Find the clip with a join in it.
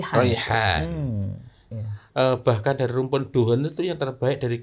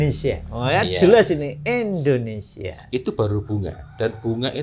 first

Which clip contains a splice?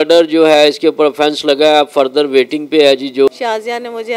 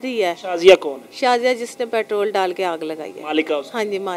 first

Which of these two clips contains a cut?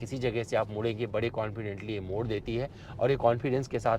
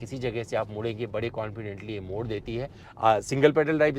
second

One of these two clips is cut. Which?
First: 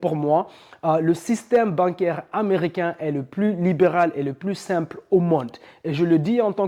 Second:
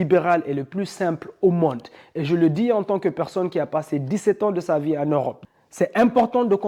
second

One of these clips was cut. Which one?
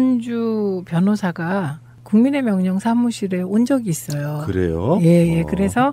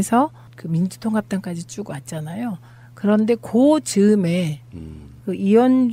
first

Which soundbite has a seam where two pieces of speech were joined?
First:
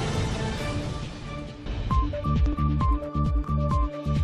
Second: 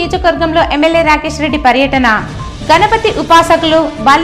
first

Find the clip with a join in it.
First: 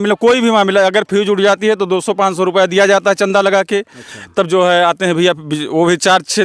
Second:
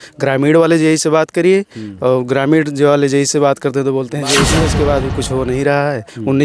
second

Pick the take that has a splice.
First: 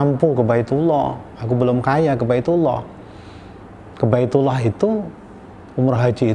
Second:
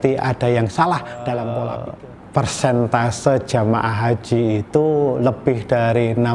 second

